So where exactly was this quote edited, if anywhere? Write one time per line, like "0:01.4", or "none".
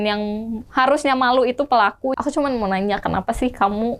0:02.1